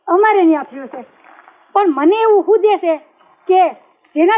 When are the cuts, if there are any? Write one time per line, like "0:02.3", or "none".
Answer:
none